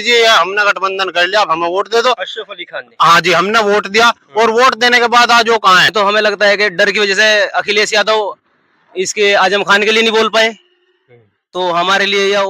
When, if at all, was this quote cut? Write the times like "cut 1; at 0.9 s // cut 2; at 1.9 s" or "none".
cut 1; at 5.9 s